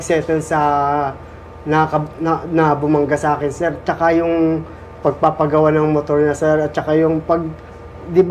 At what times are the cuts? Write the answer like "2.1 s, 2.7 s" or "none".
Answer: none